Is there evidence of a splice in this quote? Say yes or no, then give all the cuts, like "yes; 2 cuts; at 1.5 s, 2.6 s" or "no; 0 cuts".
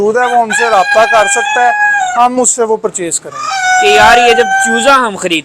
yes; 1 cut; at 3.5 s